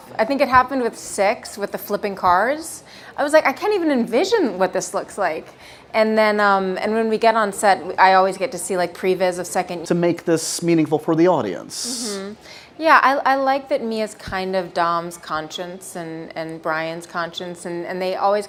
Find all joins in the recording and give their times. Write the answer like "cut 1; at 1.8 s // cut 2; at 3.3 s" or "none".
none